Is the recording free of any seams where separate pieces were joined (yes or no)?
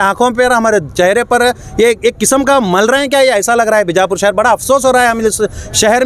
yes